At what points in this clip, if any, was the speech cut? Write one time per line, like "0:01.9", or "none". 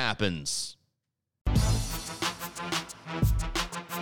0:01.4
0:03.2